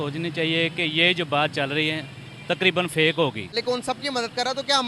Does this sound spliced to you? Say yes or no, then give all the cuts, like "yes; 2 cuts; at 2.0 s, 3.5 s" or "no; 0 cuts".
yes; 1 cut; at 3.6 s